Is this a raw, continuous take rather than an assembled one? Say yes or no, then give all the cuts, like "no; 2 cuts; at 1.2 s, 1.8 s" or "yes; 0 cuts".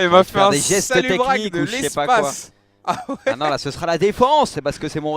yes; 0 cuts